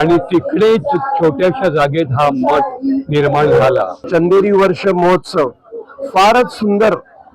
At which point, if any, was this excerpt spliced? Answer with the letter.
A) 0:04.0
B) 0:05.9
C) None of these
A